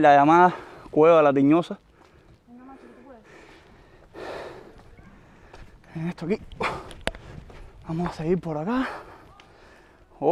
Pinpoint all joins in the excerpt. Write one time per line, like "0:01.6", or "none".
none

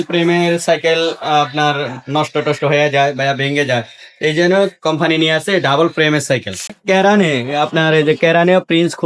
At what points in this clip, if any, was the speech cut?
0:06.8

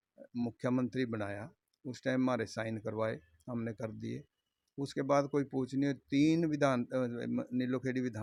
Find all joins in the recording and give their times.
none

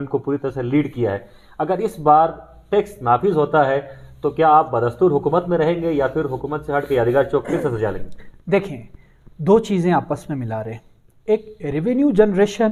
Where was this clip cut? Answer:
none

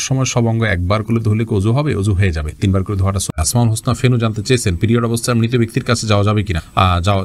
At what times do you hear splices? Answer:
none

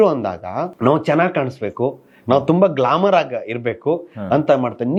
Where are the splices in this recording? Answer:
none

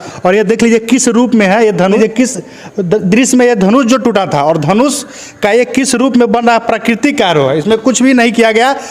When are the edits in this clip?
0:02.0

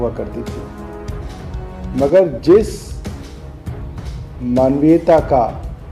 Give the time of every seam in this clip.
none

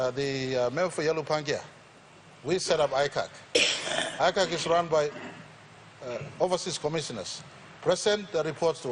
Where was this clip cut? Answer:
none

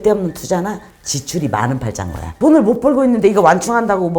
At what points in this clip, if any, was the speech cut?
0:02.3

